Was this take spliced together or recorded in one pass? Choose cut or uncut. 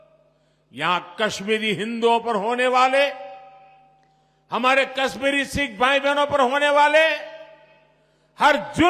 uncut